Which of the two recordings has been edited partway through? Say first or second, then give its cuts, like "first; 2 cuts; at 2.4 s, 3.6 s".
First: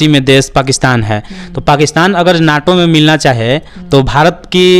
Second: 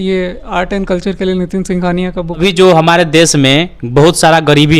second; 1 cut; at 2.4 s